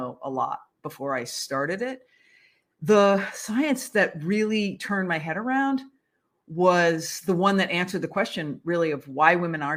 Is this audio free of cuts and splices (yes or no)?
yes